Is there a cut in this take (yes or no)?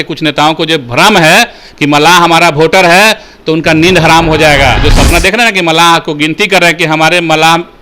yes